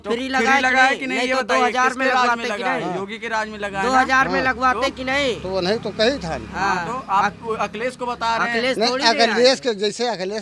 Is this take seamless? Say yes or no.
yes